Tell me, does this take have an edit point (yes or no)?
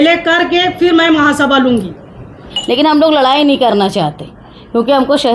yes